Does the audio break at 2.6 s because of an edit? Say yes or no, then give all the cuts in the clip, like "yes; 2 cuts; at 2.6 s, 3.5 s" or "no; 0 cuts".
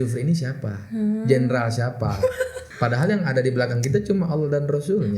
yes; 1 cut; at 2.6 s